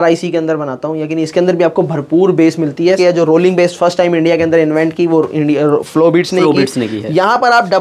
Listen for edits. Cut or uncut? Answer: cut